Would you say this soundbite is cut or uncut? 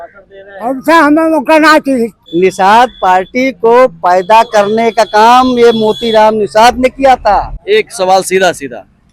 cut